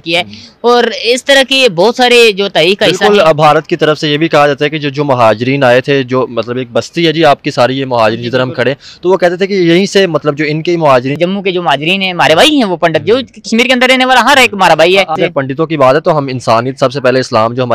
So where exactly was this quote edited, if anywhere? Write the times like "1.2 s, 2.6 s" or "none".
11.2 s, 15.2 s